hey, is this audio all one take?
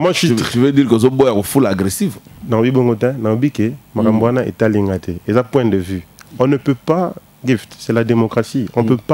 yes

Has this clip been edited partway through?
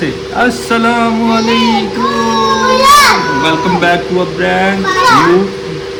no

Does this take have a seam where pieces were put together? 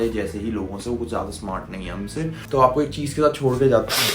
yes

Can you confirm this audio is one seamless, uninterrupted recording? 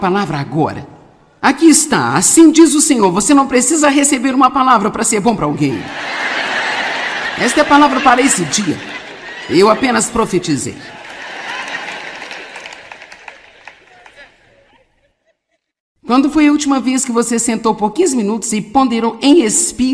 no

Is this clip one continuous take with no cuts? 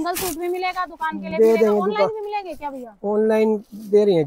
yes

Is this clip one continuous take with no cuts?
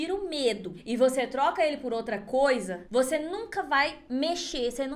yes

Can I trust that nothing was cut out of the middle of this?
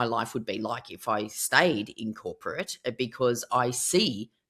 yes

